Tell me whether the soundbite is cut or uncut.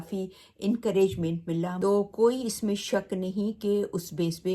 cut